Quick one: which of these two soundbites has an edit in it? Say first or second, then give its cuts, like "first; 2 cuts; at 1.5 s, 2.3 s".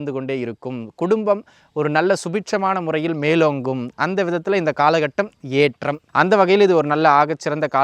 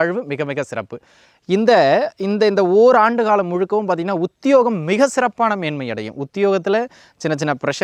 first; 1 cut; at 6.0 s